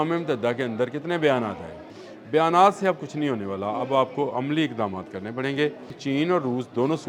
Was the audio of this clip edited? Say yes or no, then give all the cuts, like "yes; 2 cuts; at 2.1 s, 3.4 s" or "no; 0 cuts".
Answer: yes; 2 cuts; at 1.9 s, 6.0 s